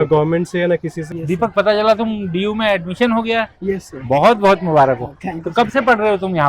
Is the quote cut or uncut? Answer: cut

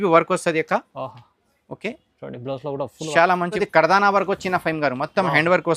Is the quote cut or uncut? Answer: cut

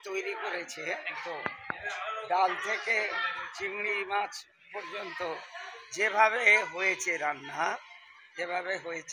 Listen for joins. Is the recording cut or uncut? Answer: cut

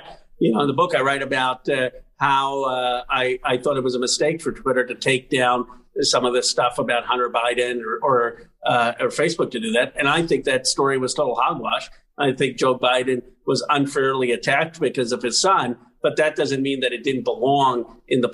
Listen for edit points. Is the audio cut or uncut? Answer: uncut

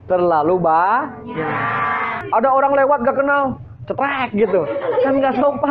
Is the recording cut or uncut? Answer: cut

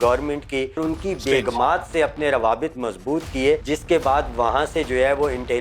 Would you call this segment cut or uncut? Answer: cut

